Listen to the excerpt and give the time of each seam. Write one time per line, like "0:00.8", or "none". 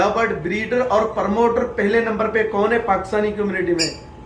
none